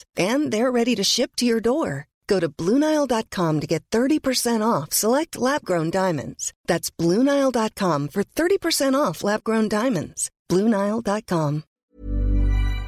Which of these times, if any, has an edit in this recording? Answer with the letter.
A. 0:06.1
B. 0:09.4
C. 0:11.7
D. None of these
C